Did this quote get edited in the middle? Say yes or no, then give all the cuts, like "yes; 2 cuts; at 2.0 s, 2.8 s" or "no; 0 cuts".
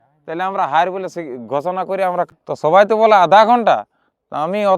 yes; 1 cut; at 2.3 s